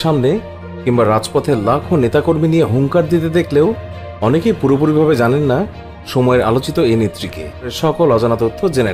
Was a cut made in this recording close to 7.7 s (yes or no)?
yes